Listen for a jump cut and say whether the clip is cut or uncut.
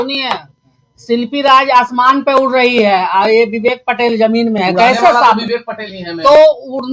uncut